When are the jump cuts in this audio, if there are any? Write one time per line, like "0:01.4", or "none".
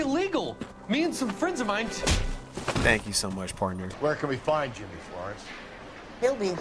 0:03.9